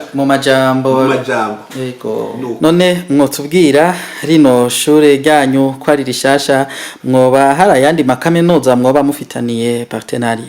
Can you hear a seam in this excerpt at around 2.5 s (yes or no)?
yes